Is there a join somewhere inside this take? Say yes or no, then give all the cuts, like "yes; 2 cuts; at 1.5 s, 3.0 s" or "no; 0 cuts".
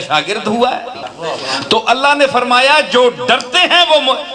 yes; 1 cut; at 1.0 s